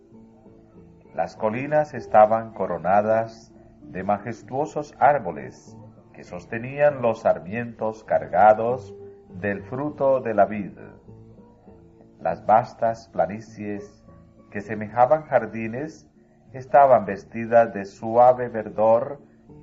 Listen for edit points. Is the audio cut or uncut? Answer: cut